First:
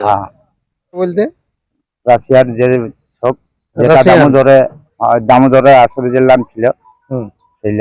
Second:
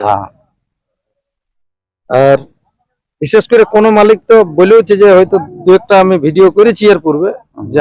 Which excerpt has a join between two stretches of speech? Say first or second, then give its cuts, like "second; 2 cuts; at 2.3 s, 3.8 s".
first; 1 cut; at 1.0 s